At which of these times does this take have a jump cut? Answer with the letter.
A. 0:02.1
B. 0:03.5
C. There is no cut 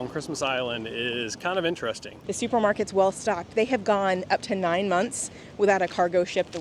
A